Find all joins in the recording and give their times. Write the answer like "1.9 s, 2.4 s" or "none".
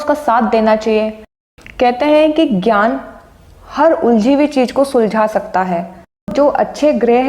1.3 s, 6.3 s

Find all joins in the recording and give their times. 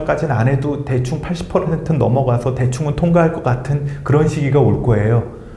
none

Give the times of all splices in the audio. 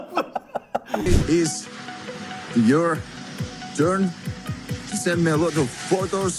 1.1 s

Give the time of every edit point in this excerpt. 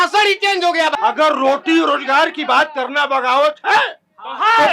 0.9 s

